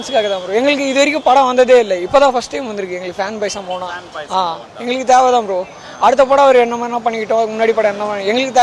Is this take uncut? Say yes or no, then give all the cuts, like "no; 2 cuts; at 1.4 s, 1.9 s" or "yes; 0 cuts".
yes; 0 cuts